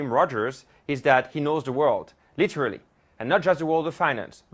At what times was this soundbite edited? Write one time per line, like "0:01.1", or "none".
0:01.3